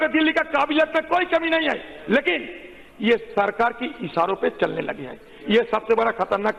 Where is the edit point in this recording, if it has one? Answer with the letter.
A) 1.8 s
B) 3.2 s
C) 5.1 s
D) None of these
D